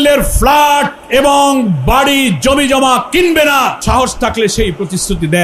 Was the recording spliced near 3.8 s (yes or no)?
yes